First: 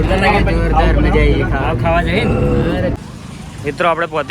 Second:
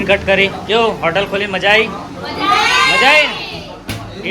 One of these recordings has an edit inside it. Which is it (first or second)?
first